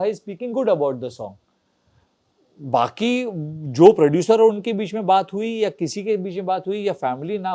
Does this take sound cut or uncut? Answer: uncut